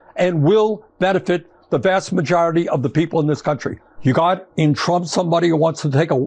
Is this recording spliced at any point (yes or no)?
yes